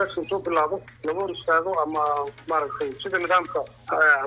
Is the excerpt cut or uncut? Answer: cut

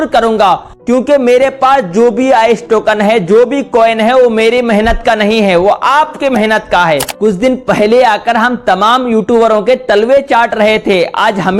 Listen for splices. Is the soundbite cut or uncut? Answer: cut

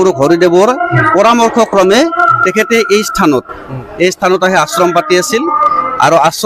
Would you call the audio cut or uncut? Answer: uncut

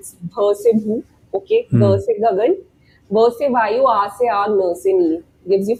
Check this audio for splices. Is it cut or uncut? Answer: uncut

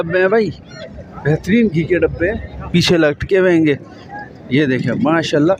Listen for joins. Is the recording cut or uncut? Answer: uncut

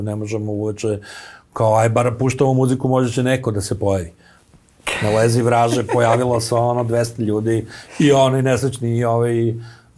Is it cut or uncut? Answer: uncut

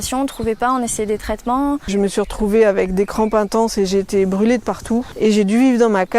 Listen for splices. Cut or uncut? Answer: cut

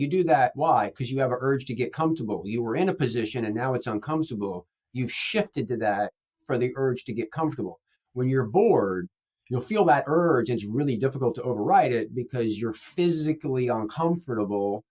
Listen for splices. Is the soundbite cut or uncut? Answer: uncut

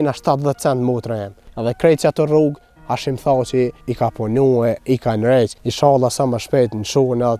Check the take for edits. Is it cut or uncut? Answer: cut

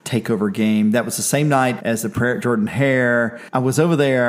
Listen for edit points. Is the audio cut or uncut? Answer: cut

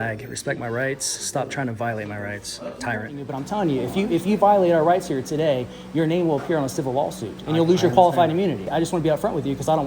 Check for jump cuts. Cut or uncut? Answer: cut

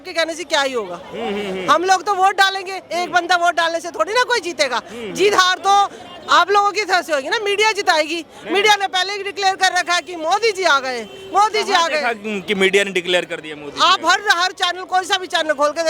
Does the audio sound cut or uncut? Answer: uncut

